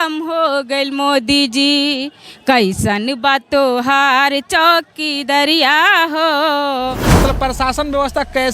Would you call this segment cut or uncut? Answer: cut